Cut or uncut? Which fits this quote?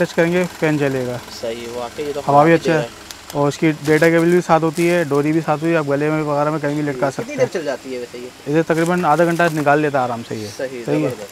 uncut